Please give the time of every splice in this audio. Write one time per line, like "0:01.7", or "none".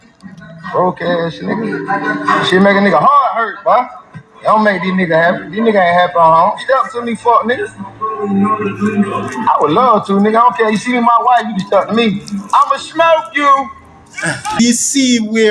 0:14.6